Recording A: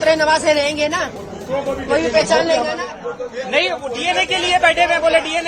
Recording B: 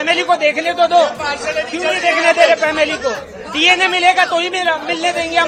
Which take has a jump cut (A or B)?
A